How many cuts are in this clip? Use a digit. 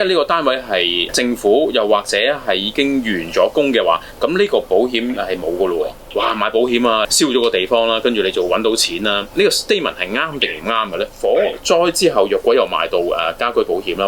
4